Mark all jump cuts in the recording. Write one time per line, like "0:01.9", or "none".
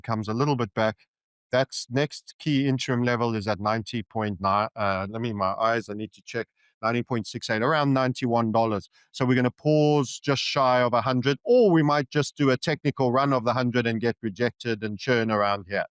none